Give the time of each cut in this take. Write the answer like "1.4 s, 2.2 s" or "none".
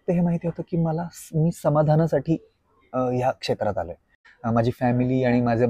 4.3 s